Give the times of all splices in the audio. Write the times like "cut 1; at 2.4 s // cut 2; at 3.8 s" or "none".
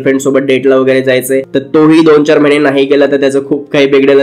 none